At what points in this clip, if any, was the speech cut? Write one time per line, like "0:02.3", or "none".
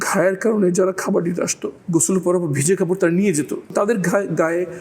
0:01.7
0:03.7